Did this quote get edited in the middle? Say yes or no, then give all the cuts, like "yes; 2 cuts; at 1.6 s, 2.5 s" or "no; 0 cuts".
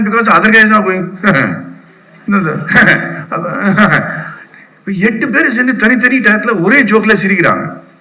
no; 0 cuts